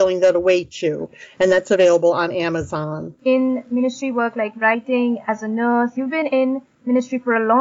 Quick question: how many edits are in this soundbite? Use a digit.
0